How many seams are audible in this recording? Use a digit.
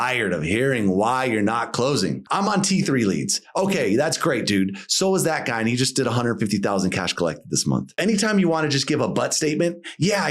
2